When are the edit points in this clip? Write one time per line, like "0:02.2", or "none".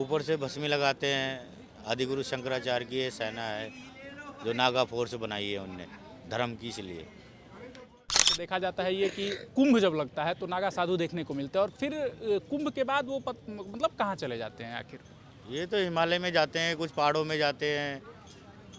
0:08.4